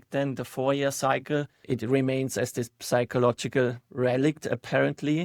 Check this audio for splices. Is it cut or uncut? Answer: cut